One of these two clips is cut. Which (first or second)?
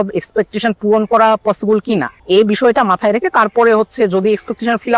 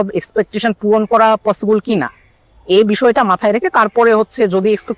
first